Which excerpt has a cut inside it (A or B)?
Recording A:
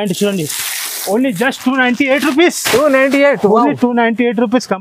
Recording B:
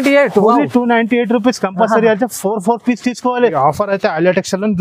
B